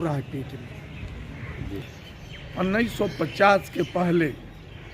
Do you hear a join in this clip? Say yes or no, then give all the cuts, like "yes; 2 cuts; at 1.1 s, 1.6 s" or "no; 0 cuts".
yes; 1 cut; at 1.8 s